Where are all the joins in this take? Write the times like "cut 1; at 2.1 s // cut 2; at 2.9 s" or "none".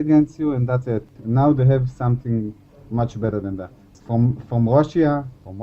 cut 1; at 1.1 s // cut 2; at 4.0 s